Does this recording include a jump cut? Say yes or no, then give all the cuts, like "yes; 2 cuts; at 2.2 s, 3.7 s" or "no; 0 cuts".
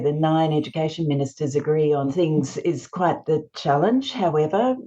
yes; 1 cut; at 2.1 s